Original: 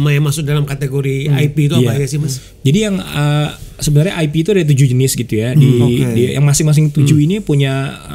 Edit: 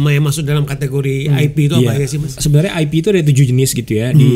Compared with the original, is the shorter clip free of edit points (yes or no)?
no